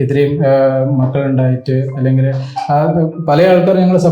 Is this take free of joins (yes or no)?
yes